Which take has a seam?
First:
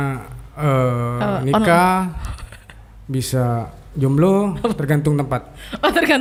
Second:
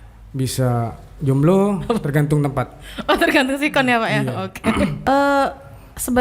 second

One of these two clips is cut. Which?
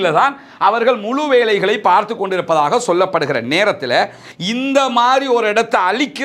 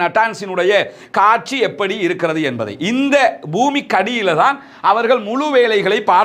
first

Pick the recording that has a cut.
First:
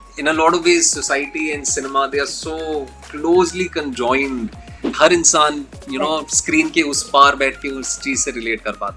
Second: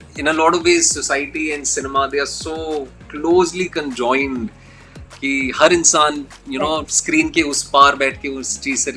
first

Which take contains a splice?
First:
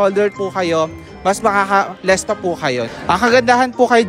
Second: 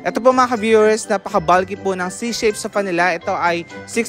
first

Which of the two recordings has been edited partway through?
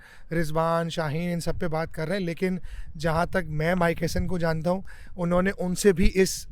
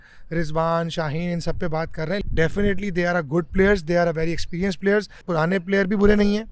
second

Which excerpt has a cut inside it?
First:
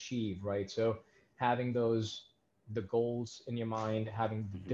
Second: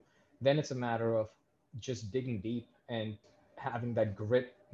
second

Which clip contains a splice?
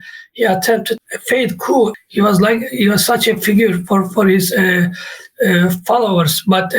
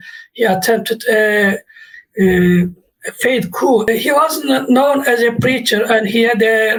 first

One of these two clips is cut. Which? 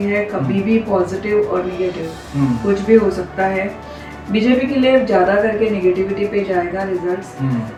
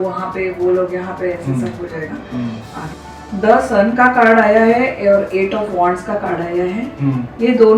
second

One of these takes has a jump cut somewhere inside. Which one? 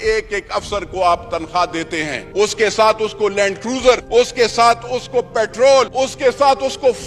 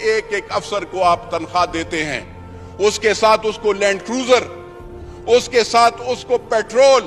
first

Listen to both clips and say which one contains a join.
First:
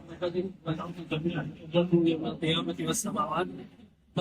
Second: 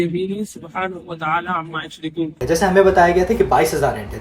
second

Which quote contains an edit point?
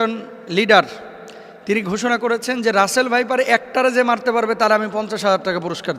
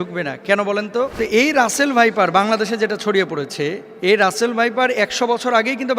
second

